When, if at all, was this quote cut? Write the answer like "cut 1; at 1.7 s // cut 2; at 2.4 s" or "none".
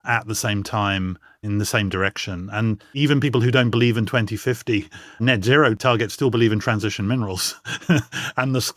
cut 1; at 1.4 s // cut 2; at 2.9 s // cut 3; at 5.8 s